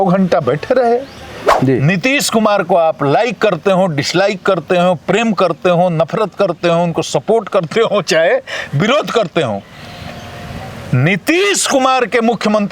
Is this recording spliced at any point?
yes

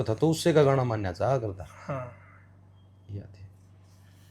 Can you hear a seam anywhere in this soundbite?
no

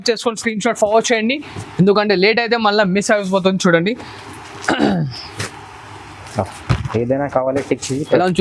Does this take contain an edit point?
no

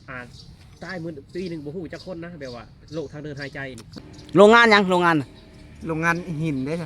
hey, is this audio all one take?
no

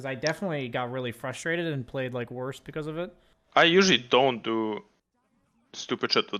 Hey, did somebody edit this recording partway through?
no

